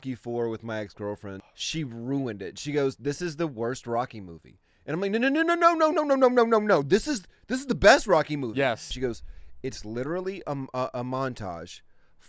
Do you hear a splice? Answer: yes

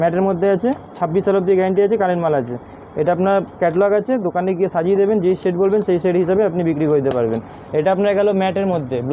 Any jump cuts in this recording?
no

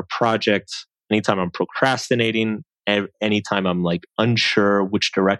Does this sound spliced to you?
no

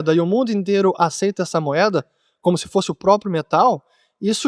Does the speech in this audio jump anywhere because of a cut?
no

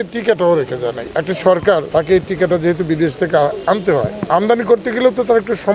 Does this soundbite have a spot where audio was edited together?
yes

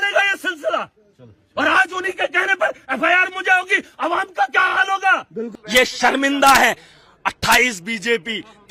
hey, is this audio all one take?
no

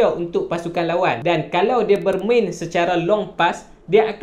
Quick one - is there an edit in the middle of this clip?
yes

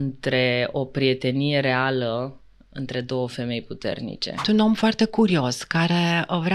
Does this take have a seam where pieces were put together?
yes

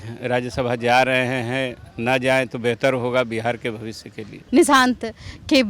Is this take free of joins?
no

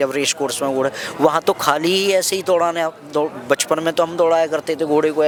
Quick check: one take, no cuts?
yes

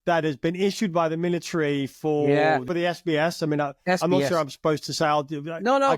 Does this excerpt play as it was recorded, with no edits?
yes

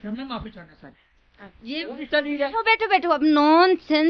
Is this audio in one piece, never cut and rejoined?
yes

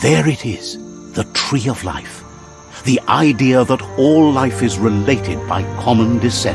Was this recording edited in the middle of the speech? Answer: no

